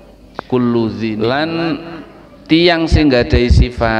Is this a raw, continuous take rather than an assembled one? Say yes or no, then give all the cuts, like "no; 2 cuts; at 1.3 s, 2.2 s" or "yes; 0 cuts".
no; 1 cut; at 1.1 s